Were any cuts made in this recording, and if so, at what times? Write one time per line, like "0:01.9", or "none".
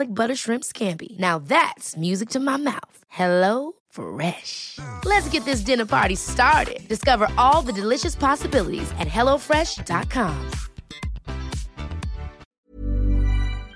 0:12.5